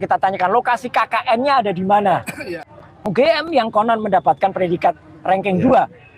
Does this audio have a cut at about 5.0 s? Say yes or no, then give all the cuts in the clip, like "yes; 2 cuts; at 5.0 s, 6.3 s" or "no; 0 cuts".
no; 1 cut; at 2.4 s